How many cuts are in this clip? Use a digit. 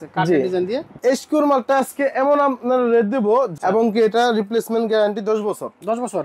2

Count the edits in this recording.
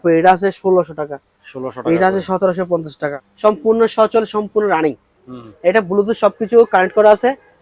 1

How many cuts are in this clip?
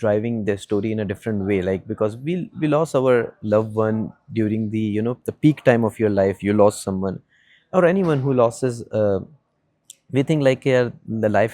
0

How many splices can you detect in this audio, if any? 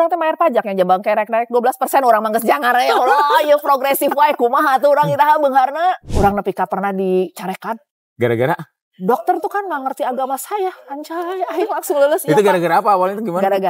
1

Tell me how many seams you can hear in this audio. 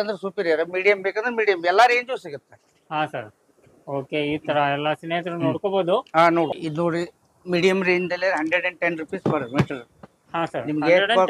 1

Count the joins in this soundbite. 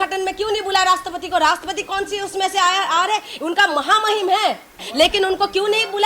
1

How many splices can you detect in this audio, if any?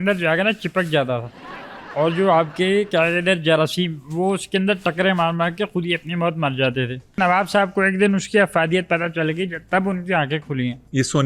1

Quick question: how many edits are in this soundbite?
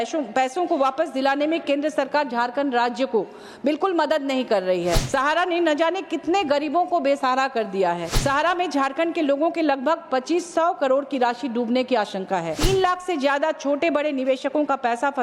3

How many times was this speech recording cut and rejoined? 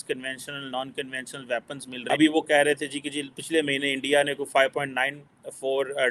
1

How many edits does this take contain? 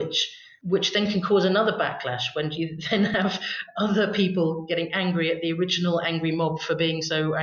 0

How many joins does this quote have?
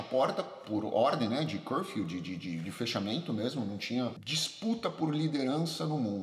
1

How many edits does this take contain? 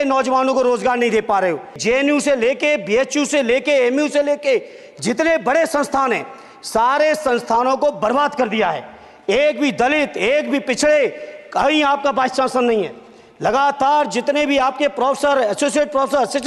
1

